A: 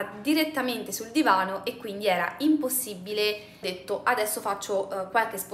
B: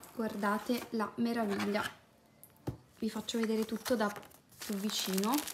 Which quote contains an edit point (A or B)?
A